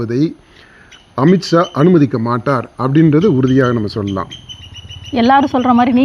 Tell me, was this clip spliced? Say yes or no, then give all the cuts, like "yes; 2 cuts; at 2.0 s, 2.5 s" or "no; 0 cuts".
no; 0 cuts